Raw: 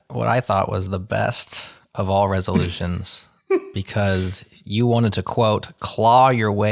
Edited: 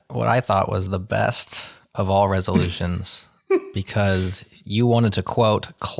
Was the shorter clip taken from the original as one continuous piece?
yes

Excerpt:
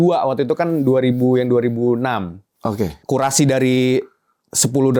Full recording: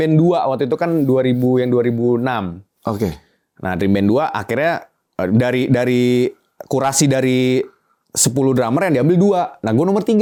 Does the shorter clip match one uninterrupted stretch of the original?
no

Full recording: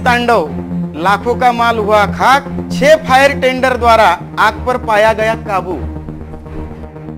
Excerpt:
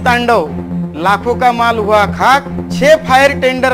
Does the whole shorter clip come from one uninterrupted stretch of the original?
yes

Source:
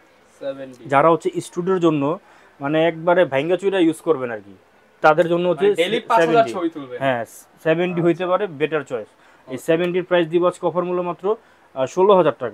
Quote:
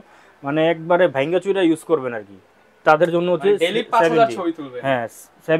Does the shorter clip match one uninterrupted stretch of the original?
yes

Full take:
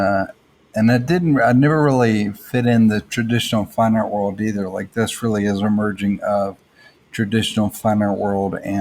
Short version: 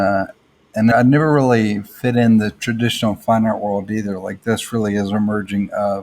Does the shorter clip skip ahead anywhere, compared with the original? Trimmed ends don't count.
yes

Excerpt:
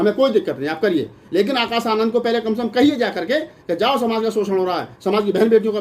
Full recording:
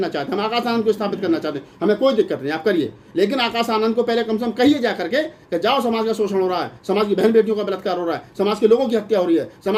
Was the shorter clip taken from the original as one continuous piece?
yes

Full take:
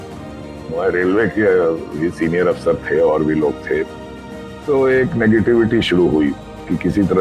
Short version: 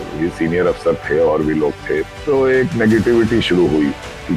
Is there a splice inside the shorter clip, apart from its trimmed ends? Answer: yes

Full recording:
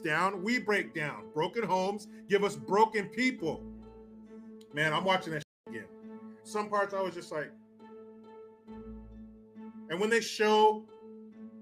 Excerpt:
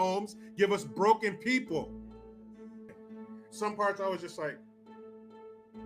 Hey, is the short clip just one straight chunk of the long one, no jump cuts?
no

